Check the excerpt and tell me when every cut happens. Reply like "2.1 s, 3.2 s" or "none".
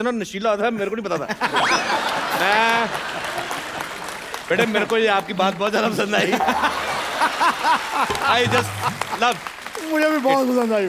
none